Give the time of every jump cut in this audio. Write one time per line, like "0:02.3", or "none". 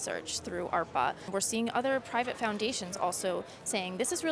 0:01.3